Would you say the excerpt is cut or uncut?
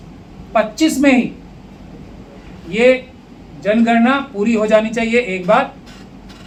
uncut